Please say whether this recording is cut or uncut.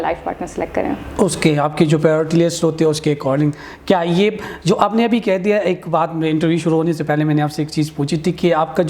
uncut